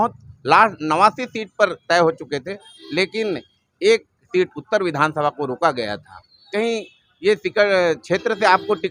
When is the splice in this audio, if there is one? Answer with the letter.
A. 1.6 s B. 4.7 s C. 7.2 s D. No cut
D